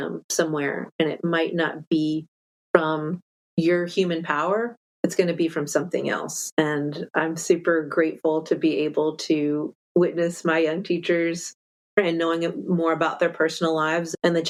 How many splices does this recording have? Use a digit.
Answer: 0